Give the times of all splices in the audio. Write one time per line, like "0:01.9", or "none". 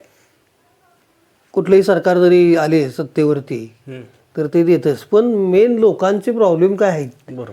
none